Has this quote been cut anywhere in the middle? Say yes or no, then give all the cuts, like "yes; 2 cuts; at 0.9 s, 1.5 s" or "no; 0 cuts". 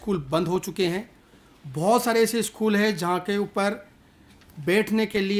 no; 0 cuts